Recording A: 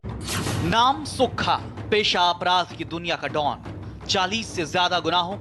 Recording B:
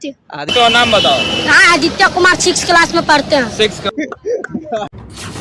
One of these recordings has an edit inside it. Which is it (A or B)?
B